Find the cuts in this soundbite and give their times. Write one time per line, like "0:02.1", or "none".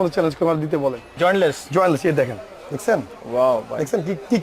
0:01.1